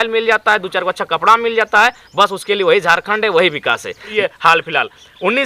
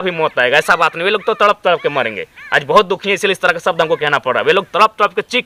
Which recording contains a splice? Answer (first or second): first